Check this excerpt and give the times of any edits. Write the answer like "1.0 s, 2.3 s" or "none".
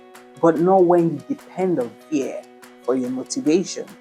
none